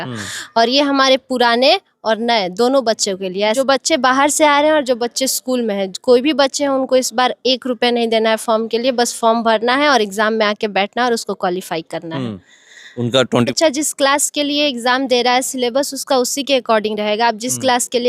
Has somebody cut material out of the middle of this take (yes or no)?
yes